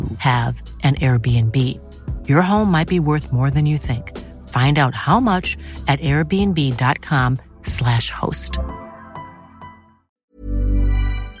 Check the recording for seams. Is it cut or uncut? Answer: cut